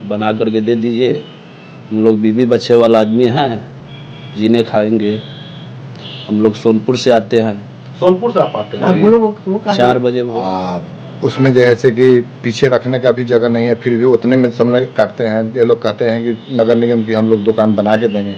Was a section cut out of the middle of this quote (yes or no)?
yes